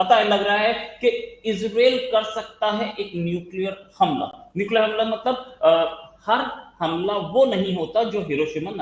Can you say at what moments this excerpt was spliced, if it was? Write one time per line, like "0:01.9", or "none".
none